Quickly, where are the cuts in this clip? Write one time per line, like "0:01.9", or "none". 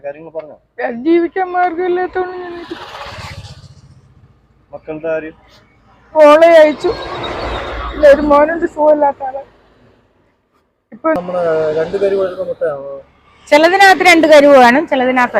0:11.2

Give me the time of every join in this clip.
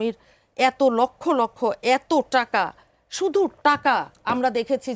none

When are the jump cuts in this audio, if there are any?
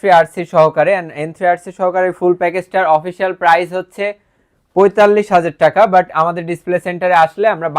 none

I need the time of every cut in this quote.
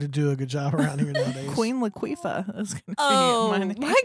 none

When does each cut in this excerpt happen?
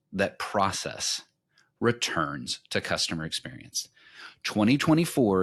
none

